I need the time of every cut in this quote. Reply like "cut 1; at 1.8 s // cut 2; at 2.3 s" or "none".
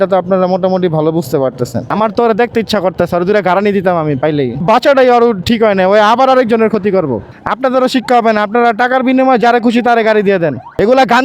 cut 1; at 1.9 s // cut 2; at 4.6 s // cut 3; at 7.3 s

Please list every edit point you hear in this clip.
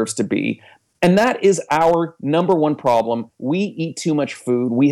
cut 1; at 3.3 s

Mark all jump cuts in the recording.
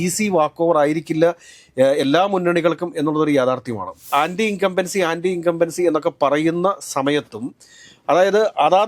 cut 1; at 4.1 s

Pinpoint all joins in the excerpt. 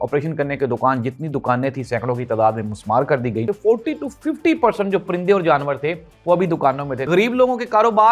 cut 1; at 3.5 s // cut 2; at 7.1 s

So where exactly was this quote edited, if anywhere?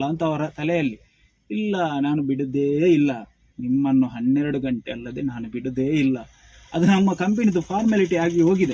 none

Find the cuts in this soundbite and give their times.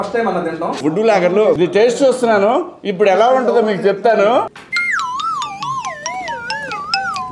cut 1; at 0.8 s // cut 2; at 1.6 s // cut 3; at 4.6 s

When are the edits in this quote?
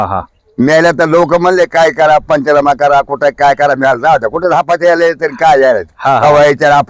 none

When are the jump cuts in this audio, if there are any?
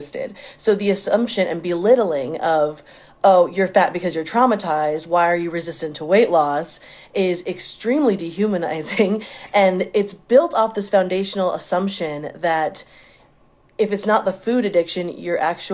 cut 1; at 3.5 s

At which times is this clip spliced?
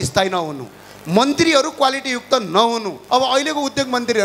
cut 1; at 3.0 s

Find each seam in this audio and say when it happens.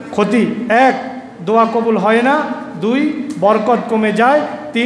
none

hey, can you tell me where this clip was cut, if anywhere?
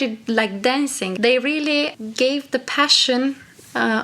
cut 1; at 1.0 s // cut 2; at 2.0 s

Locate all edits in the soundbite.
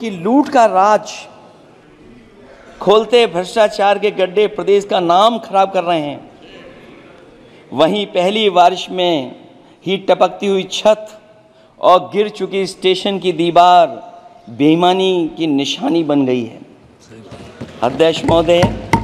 none

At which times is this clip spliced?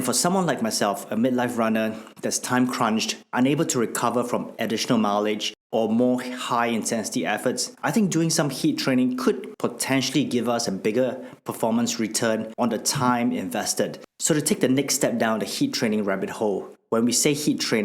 cut 1; at 5.5 s // cut 2; at 12.5 s

